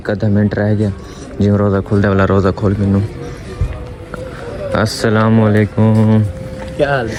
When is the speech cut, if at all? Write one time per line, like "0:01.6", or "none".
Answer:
none